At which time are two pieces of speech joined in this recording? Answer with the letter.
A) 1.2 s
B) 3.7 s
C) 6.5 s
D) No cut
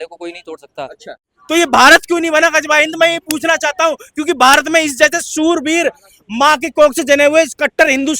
A